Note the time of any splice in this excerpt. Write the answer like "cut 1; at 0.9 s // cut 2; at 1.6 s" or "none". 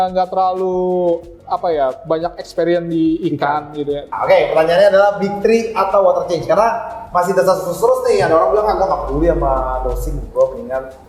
cut 1; at 4.1 s